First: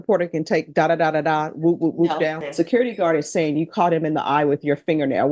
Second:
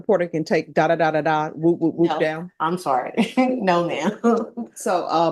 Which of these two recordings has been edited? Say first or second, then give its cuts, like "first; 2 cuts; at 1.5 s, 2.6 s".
first; 1 cut; at 2.4 s